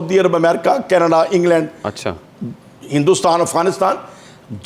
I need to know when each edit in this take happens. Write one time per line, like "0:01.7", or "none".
none